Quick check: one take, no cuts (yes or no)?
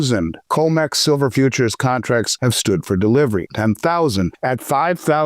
no